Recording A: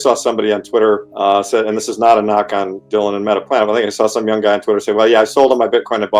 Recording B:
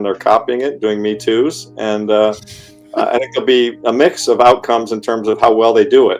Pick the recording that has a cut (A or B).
A